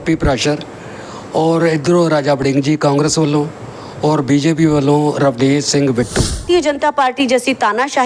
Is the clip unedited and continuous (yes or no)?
no